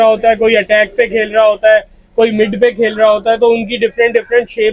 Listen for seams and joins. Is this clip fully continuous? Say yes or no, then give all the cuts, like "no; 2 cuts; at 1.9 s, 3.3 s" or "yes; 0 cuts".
yes; 0 cuts